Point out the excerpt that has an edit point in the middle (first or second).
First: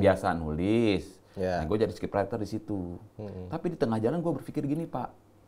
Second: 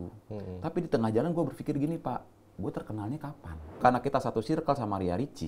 second